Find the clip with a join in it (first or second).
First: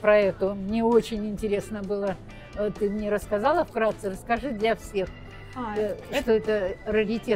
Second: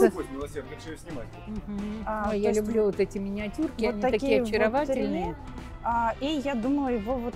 second